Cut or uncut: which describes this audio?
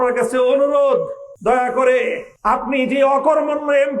cut